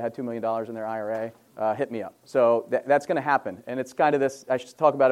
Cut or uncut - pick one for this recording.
cut